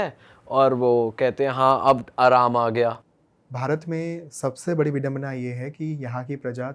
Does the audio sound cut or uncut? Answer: cut